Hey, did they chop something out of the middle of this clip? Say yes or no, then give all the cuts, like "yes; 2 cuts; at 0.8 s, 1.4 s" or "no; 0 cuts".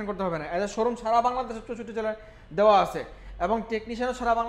no; 0 cuts